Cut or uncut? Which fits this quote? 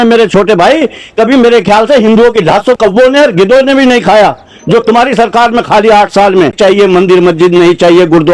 cut